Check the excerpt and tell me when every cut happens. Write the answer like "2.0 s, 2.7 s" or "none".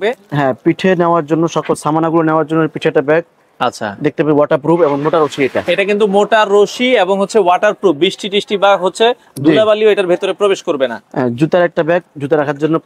none